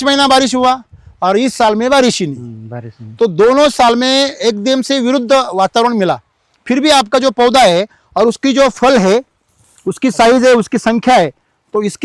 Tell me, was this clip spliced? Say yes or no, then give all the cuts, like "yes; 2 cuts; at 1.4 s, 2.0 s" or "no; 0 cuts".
no; 0 cuts